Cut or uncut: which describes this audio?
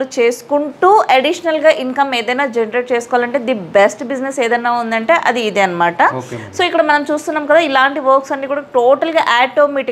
uncut